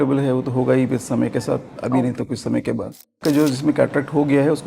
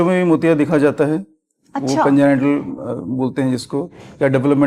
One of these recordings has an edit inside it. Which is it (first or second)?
first